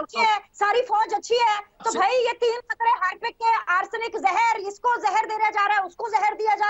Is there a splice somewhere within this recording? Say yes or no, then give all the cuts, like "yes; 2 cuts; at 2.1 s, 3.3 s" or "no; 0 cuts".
no; 0 cuts